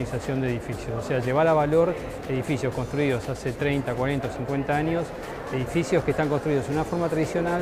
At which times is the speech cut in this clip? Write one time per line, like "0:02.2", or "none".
none

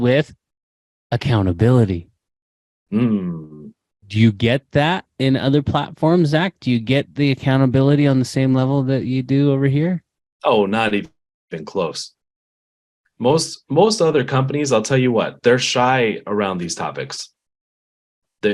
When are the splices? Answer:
0:04.0

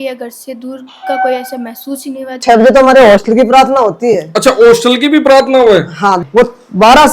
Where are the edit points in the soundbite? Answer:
0:02.4
0:06.2

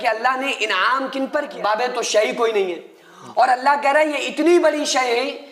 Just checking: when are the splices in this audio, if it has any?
0:01.5

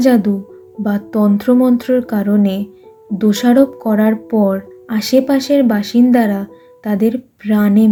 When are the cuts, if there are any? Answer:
none

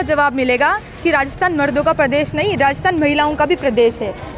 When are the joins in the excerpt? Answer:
none

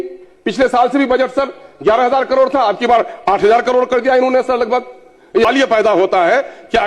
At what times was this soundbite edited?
0:05.5

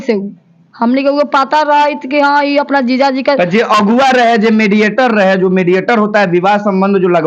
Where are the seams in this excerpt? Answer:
none

